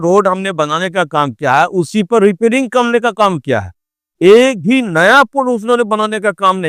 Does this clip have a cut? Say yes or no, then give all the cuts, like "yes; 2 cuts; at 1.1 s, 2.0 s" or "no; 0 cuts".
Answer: no; 0 cuts